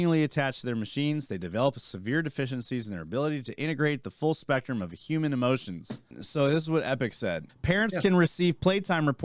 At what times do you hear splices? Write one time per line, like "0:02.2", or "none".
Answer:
0:06.2
0:07.5